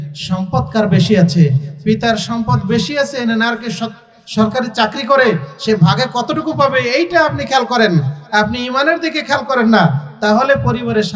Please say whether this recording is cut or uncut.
uncut